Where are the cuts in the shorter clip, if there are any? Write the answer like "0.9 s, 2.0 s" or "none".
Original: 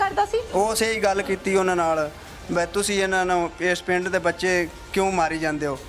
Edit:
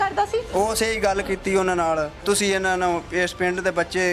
2.2 s